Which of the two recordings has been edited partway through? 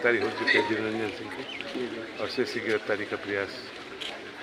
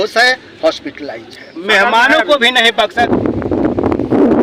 second; 1 cut; at 3.1 s

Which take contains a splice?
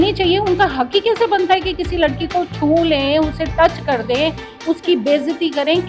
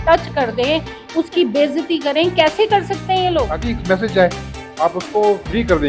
second; 1 cut; at 3.5 s

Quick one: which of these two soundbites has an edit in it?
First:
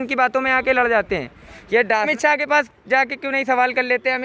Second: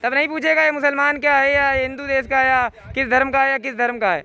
first; 1 cut; at 2.1 s

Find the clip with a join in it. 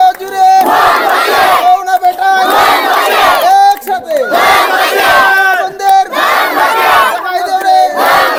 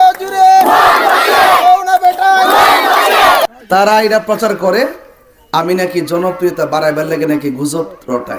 second; 1 cut; at 3.4 s

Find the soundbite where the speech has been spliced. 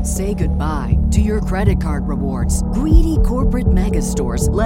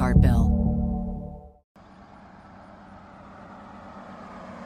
second; 1 cut; at 1.8 s

